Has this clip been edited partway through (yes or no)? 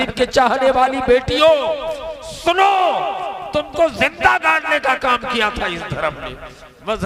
no